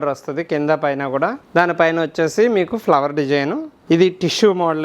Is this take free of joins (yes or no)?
no